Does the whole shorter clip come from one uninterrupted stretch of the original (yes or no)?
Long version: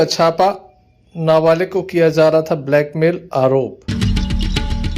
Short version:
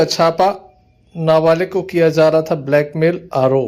yes